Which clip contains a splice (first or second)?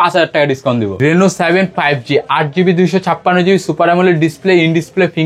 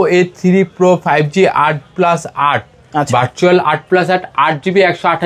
first